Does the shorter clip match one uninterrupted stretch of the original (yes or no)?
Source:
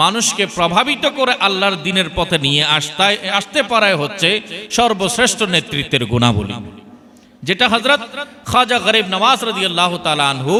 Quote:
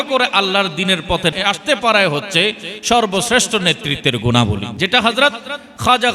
no